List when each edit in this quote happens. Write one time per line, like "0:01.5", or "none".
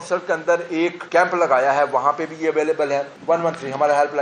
0:01.0
0:03.1